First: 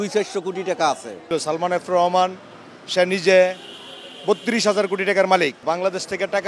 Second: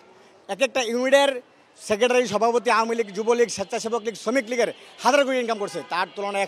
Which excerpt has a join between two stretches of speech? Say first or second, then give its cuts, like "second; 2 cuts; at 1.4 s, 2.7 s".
first; 2 cuts; at 1.2 s, 5.6 s